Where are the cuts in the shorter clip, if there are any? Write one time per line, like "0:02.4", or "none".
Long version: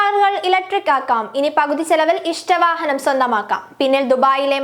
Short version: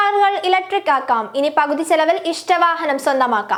none